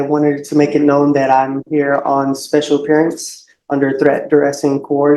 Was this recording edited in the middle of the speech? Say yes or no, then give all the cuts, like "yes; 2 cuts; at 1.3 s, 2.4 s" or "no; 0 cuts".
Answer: no; 0 cuts